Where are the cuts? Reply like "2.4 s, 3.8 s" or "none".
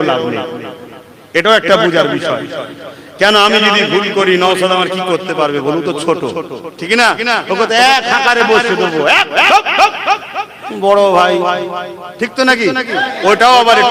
none